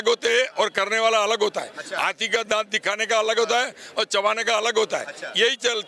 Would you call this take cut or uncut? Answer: uncut